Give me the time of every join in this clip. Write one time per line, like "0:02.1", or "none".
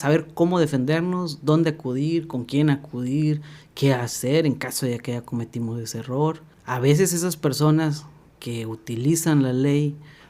0:06.5